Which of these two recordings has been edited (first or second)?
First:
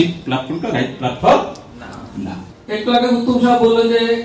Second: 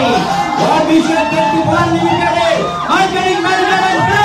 first